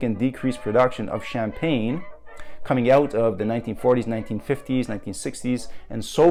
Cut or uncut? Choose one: uncut